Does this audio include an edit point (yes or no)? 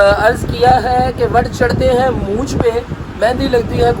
yes